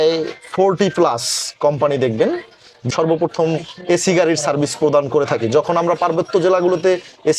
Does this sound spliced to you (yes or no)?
yes